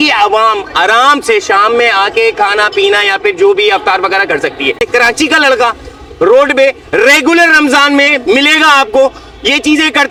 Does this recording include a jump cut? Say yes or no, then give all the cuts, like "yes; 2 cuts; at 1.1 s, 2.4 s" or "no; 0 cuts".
no; 0 cuts